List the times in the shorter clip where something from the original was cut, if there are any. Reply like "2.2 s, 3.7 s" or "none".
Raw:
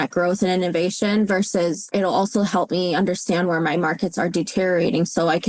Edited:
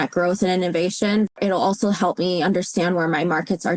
1.3 s